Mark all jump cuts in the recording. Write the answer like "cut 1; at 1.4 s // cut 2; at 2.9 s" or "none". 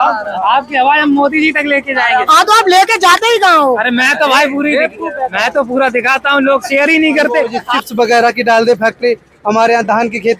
cut 1; at 7.7 s